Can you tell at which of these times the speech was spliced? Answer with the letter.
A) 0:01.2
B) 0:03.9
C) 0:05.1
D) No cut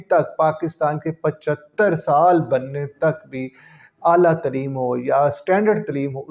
D